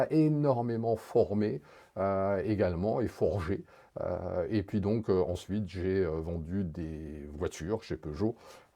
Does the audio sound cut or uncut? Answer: uncut